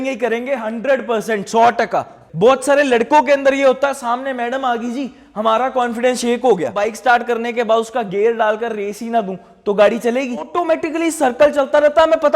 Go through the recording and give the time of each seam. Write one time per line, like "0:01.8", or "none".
0:02.2
0:06.8
0:10.5